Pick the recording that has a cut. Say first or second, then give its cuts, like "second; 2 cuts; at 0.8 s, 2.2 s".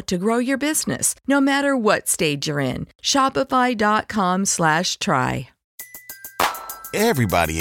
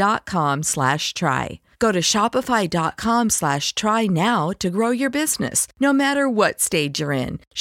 first; 1 cut; at 5.7 s